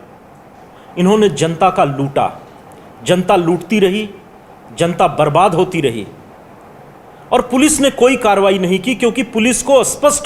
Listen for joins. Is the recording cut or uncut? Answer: uncut